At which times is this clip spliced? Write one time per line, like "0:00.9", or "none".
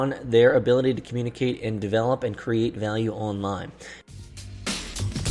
0:04.1